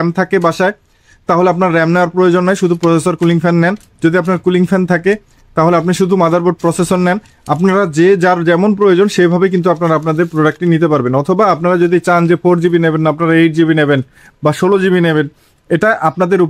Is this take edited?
no; 0 cuts

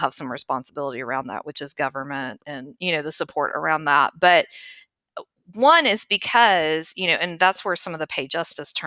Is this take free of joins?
yes; 0 cuts

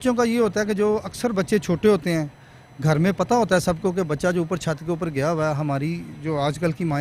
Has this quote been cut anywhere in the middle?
no; 0 cuts

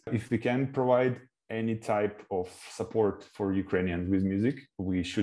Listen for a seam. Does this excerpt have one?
no; 0 cuts

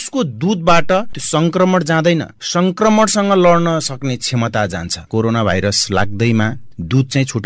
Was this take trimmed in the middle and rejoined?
yes; 2 cuts; at 1.2 s, 4.9 s

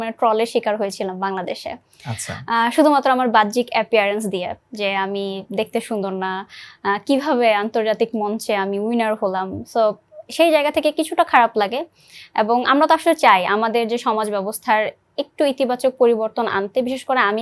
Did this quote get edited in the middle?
no; 0 cuts

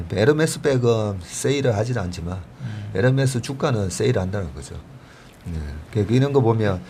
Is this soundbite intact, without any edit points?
yes; 0 cuts

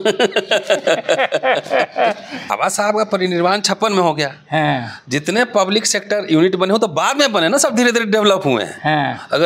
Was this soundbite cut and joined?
yes; 1 cut; at 2.5 s

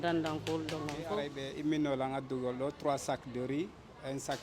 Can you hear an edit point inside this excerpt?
yes; 1 cut; at 1.4 s

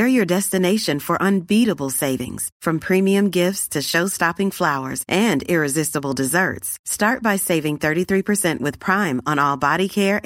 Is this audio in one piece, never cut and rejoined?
yes; 0 cuts

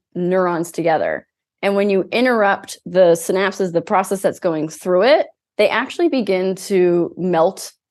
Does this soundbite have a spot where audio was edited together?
no; 0 cuts

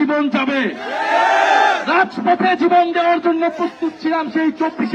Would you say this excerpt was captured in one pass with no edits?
yes; 0 cuts

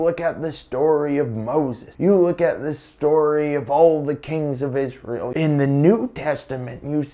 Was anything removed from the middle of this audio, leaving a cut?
yes; 2 cuts; at 1.8 s, 5.3 s

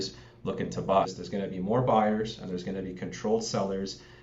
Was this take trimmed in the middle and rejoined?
yes; 1 cut; at 1.1 s

